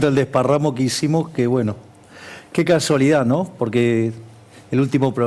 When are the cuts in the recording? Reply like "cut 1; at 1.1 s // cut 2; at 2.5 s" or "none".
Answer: none